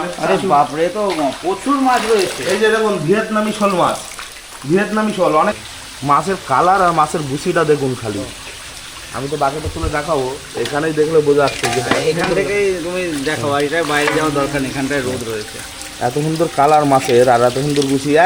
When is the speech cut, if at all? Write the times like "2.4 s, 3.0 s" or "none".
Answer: 5.6 s